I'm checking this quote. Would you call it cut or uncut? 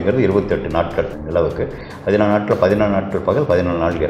cut